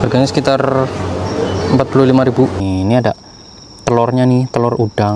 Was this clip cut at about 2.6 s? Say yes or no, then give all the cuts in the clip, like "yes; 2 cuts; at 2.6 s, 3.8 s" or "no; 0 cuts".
yes; 1 cut; at 2.6 s